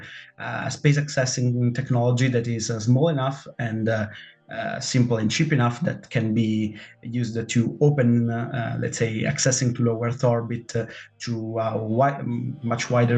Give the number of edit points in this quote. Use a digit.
0